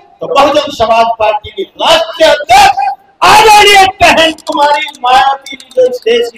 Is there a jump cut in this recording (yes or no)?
no